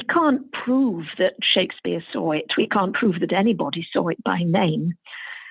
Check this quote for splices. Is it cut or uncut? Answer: uncut